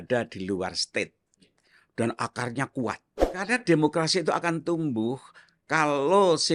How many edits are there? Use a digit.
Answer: 1